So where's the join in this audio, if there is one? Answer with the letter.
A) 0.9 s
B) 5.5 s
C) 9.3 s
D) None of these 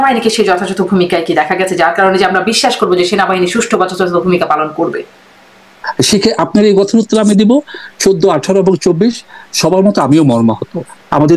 D